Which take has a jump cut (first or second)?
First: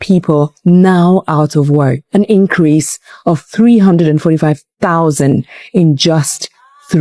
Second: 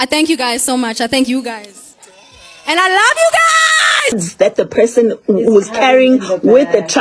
second